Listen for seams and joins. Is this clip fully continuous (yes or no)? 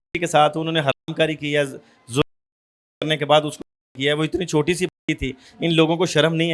yes